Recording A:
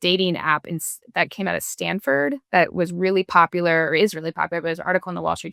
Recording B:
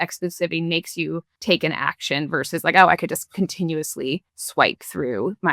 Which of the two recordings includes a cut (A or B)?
B